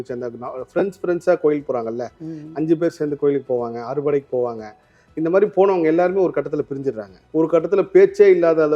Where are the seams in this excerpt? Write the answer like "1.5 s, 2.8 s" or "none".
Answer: 7.1 s